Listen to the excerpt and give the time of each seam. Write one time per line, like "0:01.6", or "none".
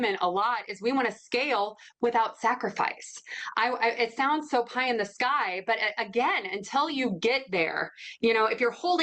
none